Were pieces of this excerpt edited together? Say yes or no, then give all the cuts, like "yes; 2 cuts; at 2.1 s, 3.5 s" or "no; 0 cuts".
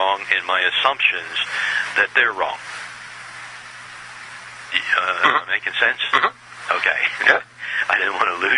no; 0 cuts